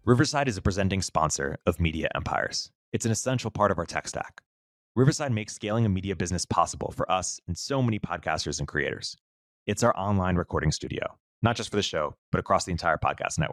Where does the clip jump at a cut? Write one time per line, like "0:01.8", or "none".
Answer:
none